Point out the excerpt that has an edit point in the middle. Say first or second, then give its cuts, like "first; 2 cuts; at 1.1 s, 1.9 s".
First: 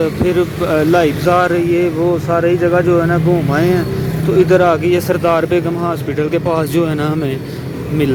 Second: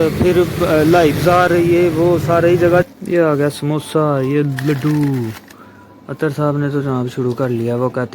second; 1 cut; at 2.8 s